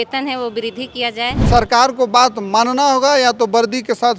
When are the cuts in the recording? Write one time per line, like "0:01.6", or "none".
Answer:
0:01.5